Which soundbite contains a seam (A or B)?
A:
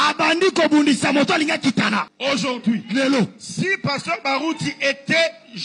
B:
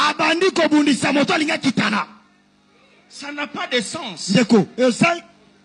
A